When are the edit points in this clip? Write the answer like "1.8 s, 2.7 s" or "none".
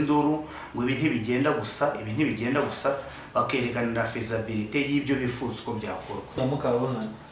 6.4 s